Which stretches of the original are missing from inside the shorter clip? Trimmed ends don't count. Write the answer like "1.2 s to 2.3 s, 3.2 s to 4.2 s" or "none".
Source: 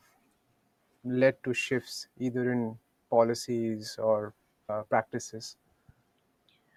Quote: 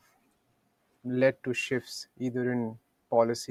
none

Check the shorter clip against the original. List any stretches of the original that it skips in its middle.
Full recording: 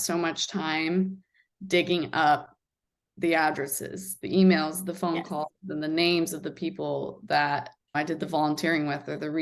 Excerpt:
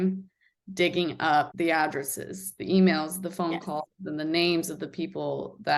2.4 s to 3.1 s

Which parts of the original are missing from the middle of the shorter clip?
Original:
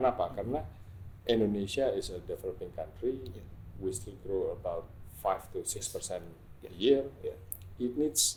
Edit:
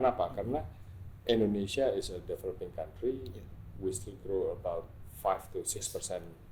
none

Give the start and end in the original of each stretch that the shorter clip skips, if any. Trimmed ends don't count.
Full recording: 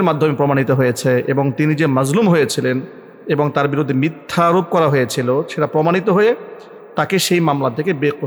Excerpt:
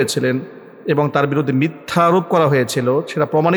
none

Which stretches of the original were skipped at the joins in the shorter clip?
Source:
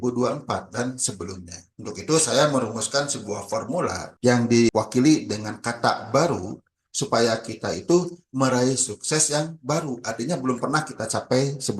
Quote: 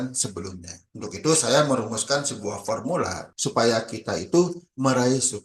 4.1 s to 6.8 s

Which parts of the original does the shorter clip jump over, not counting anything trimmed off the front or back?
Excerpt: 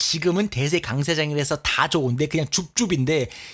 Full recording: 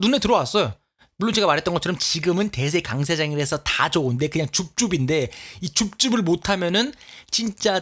none

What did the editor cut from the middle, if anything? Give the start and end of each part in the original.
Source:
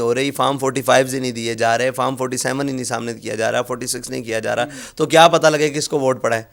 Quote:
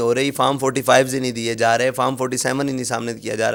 none

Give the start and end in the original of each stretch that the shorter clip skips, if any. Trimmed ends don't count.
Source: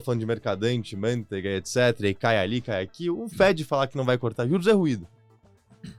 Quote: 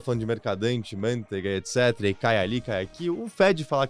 none

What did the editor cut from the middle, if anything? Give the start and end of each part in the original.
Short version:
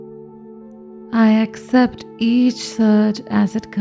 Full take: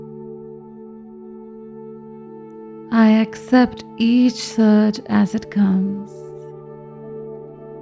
1.4 s to 2.9 s

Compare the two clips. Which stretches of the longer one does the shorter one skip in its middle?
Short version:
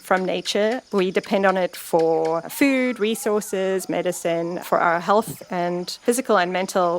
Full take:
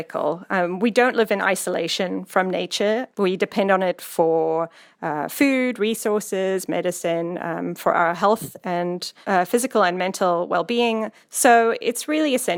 4.7 s to 5.3 s, 7.4 s to 7.8 s, 9.2 s to 9.5 s

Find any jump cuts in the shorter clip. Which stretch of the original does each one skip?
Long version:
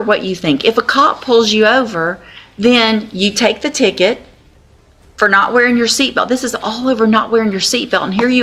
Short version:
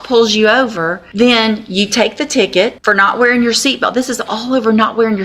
2.2 s to 2.4 s, 4.2 s to 5.1 s

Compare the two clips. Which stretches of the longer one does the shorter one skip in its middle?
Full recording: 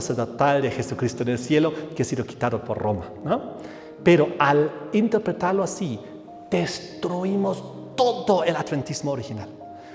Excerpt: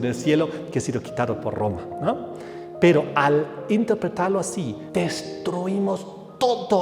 6.0 s to 6.4 s

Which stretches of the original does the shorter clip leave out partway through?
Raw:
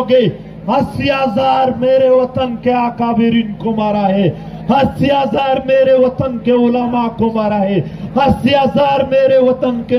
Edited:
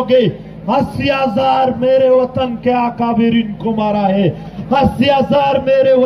4.5 s to 8.0 s

